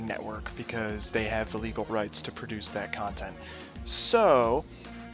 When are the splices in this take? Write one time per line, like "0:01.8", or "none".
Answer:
0:01.0